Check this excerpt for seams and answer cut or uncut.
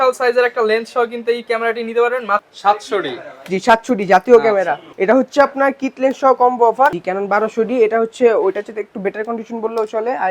cut